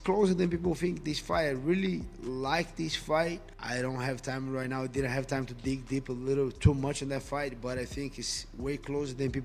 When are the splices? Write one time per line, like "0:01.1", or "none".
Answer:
none